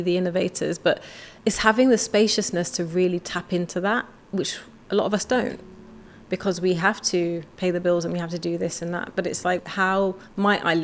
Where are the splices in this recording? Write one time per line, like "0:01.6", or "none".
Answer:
0:09.6